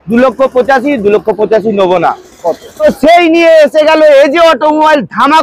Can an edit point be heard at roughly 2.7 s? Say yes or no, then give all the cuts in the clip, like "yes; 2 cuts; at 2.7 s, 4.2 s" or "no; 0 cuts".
yes; 1 cut; at 2.7 s